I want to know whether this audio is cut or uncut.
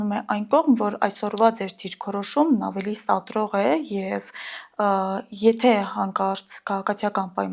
uncut